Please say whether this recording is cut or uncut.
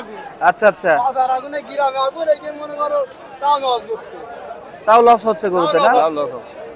uncut